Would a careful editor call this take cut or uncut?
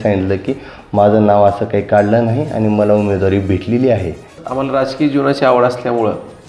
cut